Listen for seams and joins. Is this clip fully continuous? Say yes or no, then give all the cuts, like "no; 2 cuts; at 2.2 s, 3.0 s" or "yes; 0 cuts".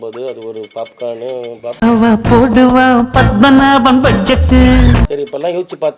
yes; 0 cuts